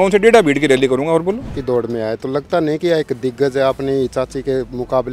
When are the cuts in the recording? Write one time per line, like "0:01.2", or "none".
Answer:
0:01.6